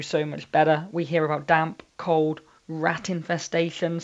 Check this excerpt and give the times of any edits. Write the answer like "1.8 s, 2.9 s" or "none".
none